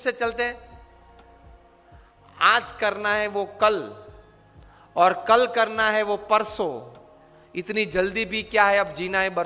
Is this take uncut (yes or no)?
yes